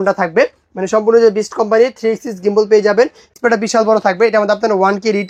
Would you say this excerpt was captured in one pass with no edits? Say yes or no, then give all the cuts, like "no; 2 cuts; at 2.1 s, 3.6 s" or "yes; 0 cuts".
no; 1 cut; at 3.3 s